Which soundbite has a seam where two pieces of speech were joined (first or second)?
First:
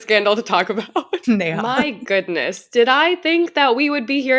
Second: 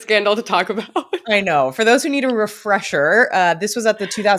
first